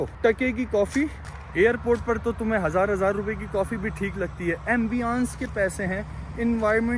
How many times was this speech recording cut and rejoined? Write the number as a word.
zero